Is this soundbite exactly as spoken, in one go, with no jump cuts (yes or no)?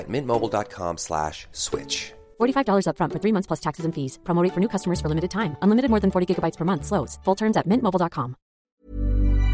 no